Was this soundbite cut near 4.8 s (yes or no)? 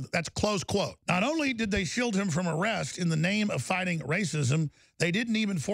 no